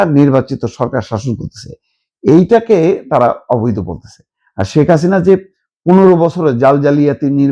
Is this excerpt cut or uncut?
uncut